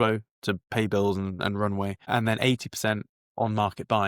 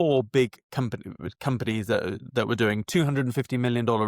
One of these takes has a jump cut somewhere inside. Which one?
first; 1 cut; at 2.1 s

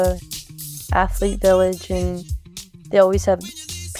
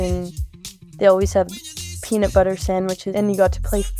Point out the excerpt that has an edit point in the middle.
second; 1 cut; at 3.1 s

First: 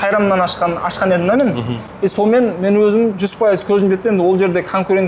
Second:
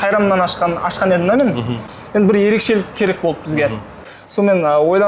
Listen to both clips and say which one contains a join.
second; 2 cuts; at 1.8 s, 4.0 s

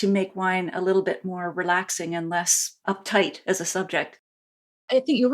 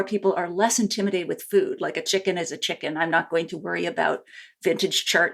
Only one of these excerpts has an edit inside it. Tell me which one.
first; 1 cut; at 2.6 s

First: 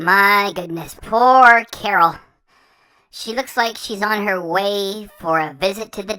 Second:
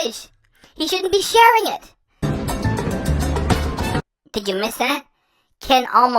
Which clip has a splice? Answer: second; 2 cuts; at 2.0 s, 3.8 s

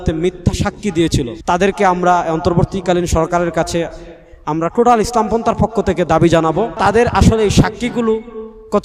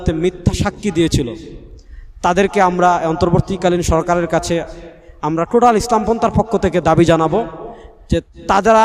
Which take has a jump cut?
first; 2 cuts; at 1.4 s, 6.7 s

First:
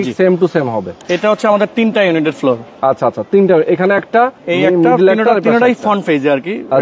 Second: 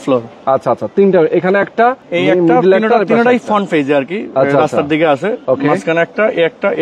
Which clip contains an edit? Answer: first; 1 cut; at 1.0 s

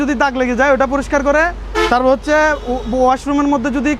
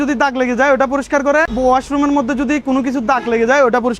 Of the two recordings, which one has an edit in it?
second; 1 cut; at 1.5 s

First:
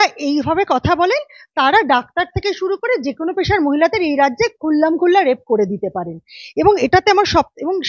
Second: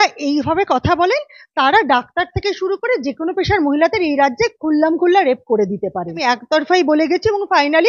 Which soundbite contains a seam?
second; 1 cut; at 6.2 s

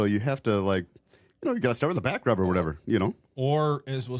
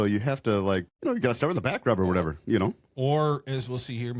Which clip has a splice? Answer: second; 1 cut; at 0.9 s

